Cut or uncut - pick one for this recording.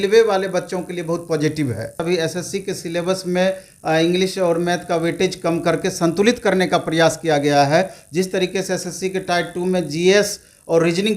cut